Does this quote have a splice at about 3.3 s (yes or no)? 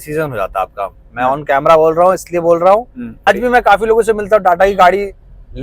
yes